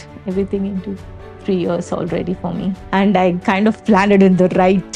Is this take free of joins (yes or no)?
no